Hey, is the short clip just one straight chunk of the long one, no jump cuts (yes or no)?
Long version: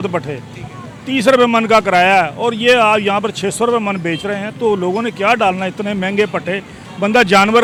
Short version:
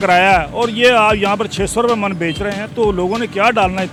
yes